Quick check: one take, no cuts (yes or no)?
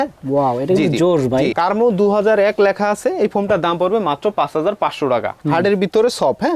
no